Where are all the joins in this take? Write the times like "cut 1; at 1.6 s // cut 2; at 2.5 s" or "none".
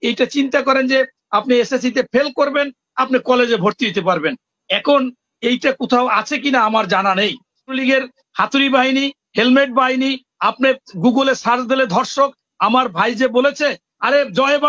cut 1; at 7.8 s